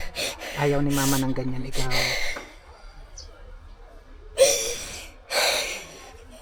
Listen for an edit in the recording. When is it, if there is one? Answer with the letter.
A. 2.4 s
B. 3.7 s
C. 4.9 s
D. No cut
D